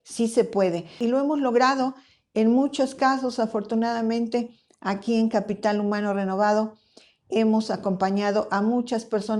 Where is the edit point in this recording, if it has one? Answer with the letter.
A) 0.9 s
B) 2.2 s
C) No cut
A